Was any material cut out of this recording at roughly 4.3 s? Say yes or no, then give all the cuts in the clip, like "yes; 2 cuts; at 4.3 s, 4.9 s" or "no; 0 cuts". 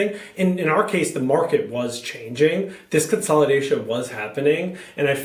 no; 0 cuts